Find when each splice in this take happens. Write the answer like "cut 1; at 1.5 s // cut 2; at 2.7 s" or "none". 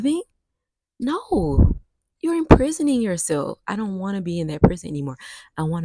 none